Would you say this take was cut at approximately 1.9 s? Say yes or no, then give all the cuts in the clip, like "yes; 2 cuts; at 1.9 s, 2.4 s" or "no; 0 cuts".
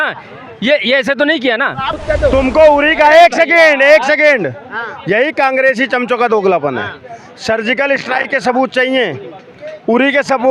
yes; 1 cut; at 1.9 s